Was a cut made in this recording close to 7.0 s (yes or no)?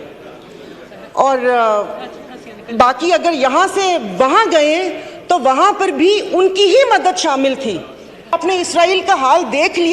no